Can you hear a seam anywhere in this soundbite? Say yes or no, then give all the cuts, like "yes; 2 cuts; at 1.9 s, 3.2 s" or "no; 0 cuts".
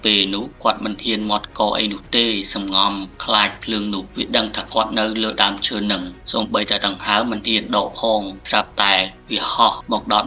no; 0 cuts